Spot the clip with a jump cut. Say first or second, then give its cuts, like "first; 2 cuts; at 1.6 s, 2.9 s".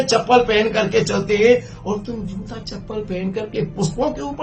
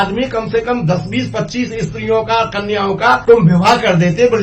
second; 1 cut; at 3.2 s